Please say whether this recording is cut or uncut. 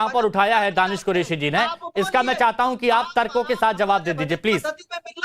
uncut